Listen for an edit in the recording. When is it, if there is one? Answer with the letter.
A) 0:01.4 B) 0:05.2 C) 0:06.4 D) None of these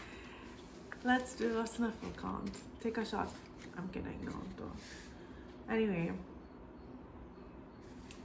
D